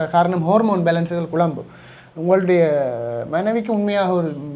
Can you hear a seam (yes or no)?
no